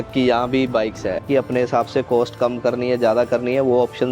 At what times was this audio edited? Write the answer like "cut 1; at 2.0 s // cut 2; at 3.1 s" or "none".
cut 1; at 1.2 s